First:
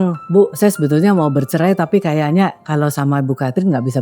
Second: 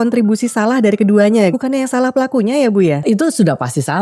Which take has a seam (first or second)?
second